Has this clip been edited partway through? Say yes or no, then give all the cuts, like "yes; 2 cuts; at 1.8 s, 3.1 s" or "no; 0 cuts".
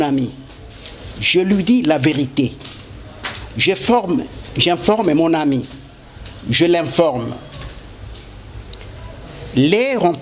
no; 0 cuts